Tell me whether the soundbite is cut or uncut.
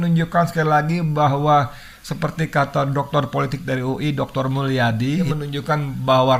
uncut